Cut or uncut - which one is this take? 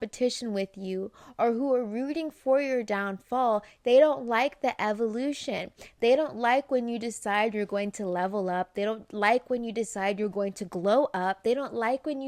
uncut